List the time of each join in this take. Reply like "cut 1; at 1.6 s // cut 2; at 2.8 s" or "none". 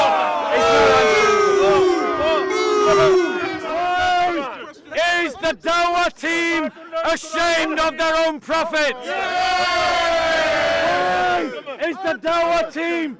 cut 1; at 3.7 s